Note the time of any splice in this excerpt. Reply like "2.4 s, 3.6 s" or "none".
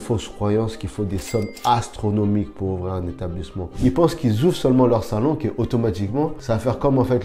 3.6 s, 6.4 s